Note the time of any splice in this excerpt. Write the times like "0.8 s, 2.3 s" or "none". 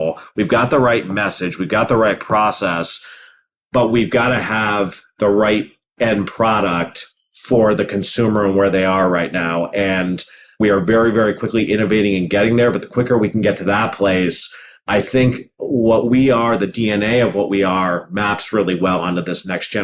none